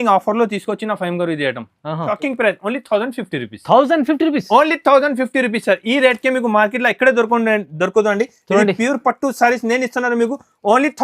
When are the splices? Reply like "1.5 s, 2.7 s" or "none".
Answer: 2.1 s